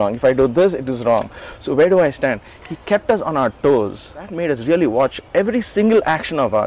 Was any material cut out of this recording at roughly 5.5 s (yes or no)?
no